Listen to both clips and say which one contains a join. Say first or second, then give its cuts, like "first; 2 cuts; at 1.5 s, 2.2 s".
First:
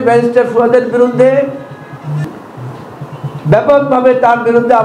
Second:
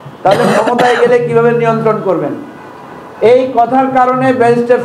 first; 1 cut; at 2.2 s